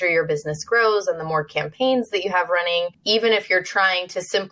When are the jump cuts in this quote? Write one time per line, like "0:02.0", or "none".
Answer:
0:03.0